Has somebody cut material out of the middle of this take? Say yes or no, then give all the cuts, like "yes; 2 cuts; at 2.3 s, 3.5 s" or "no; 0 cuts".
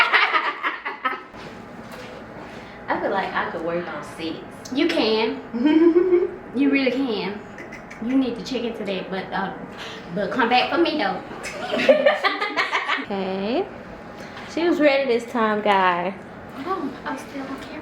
yes; 2 cuts; at 1.3 s, 13.0 s